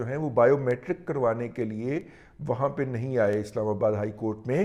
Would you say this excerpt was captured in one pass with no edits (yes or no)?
yes